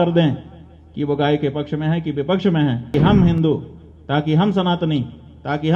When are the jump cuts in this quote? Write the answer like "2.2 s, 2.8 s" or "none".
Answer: 2.9 s